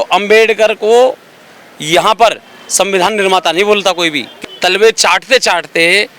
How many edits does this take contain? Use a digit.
1